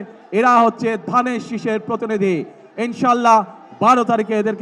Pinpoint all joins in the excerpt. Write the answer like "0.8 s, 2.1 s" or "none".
none